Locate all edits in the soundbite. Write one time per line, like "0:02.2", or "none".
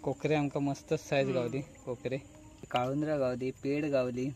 0:02.7